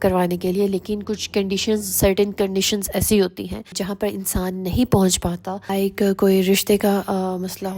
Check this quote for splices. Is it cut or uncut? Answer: uncut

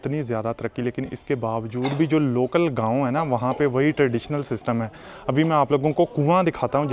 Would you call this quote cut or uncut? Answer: uncut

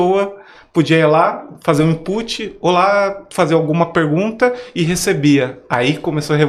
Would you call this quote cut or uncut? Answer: uncut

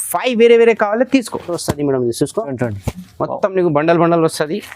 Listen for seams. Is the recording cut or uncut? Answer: cut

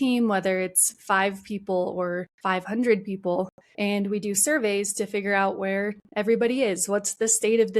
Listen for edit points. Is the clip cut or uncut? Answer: cut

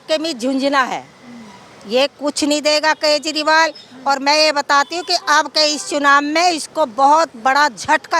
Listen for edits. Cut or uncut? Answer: uncut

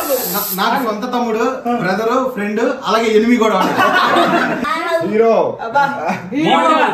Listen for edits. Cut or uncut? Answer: cut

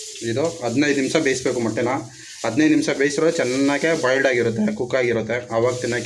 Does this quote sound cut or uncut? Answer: uncut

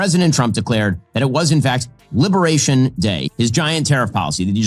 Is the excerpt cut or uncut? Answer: uncut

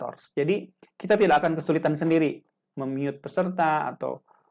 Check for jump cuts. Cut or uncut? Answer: uncut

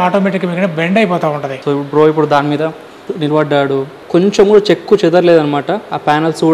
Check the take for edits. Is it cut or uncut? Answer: cut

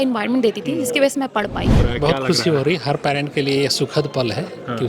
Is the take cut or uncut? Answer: cut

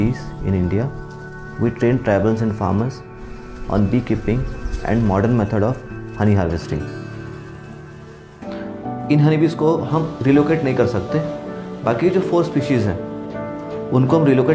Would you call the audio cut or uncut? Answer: cut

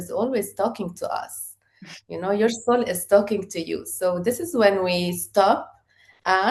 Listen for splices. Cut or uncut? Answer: uncut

